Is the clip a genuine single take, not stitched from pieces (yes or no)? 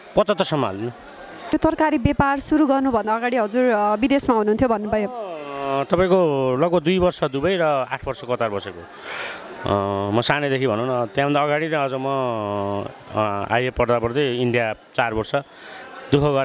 yes